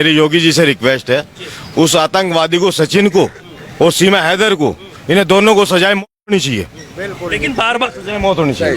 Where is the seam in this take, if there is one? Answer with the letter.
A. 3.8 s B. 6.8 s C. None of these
C